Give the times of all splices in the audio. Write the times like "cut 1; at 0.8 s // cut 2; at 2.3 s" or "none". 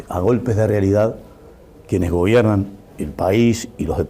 cut 1; at 2.7 s